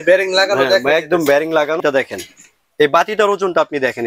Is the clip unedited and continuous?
no; 1 cut; at 1.8 s

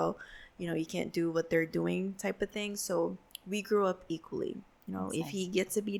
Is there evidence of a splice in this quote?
no; 0 cuts

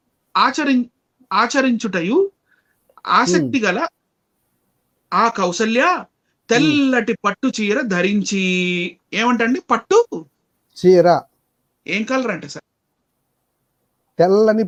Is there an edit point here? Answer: no; 0 cuts

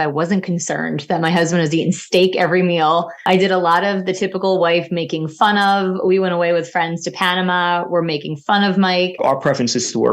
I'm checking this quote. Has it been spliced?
yes; 2 cuts; at 3.1 s, 9.2 s

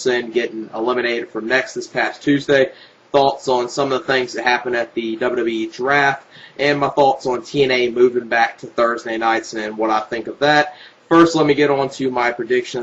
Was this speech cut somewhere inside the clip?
yes; 1 cut; at 11.8 s

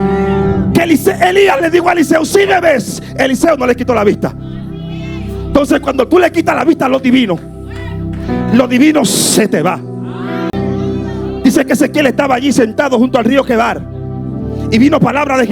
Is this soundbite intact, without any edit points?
yes; 0 cuts

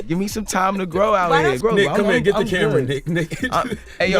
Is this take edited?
yes; 1 cut; at 1.6 s

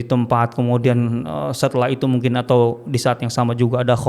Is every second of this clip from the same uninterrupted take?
yes; 0 cuts

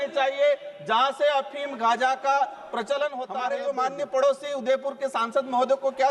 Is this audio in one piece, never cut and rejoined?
no; 1 cut; at 3.2 s

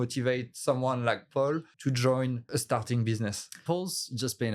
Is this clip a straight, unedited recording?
no; 2 cuts; at 1.7 s, 3.6 s

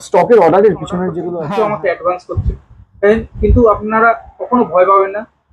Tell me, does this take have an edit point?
yes; 1 cut; at 1.2 s

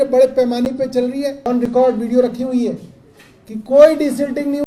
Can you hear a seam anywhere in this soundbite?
yes; 1 cut; at 1.5 s

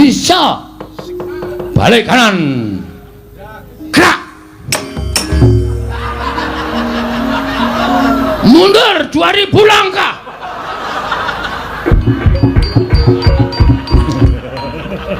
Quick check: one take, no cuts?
yes; 0 cuts

